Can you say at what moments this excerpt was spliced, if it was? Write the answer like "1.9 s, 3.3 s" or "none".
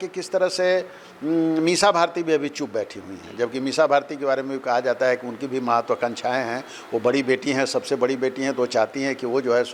none